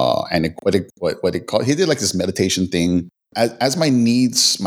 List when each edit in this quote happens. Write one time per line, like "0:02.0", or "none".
0:03.2